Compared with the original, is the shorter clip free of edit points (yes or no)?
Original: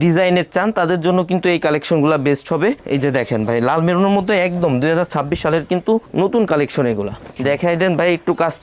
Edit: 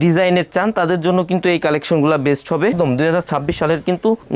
no